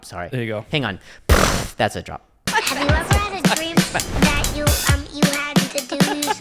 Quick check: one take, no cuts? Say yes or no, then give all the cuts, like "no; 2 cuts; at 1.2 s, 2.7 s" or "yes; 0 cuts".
no; 1 cut; at 2.3 s